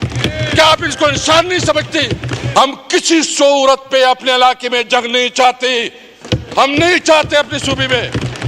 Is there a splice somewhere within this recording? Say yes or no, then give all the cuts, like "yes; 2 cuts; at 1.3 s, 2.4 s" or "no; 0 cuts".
yes; 1 cut; at 2.3 s